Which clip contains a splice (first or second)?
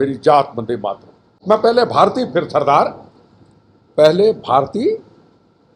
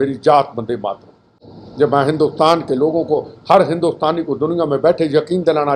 first